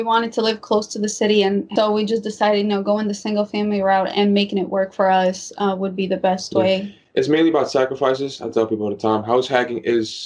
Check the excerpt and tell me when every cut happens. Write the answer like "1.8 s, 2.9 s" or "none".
1.7 s